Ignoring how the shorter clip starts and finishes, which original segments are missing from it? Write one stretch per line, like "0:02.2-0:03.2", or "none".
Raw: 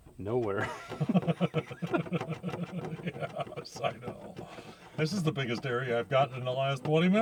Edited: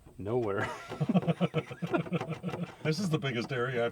0:02.7-0:04.8